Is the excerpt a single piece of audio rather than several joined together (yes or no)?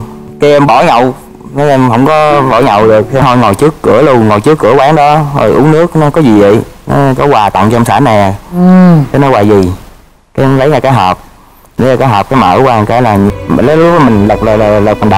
no